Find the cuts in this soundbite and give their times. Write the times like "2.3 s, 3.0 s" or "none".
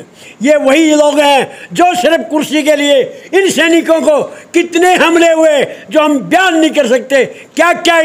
none